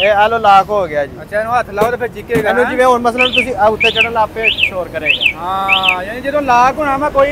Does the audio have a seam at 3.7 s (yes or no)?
no